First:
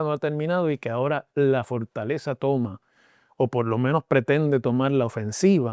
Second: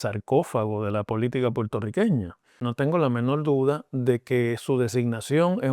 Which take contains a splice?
second; 1 cut; at 2.6 s

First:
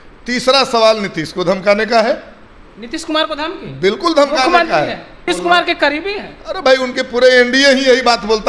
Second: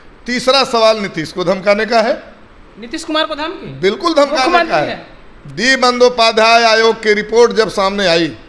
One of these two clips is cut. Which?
first; 1 cut; at 5.2 s

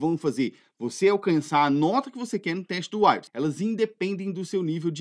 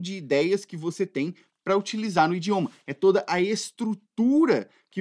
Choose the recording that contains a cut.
first; 1 cut; at 3.3 s

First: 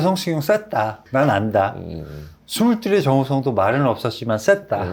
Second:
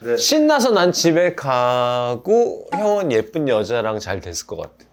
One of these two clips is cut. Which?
first; 1 cut; at 1.0 s

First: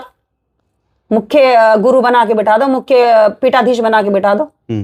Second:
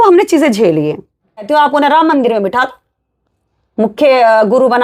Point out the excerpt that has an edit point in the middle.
second; 1 cut; at 1.5 s

